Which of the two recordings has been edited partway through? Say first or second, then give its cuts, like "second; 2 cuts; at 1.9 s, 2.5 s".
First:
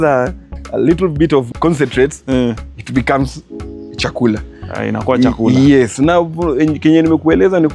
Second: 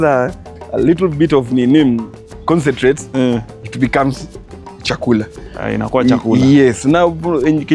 first; 1 cut; at 1.5 s